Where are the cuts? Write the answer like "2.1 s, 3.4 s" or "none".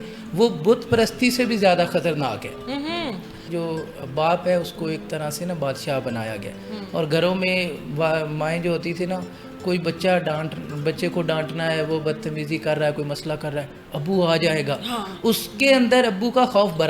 3.5 s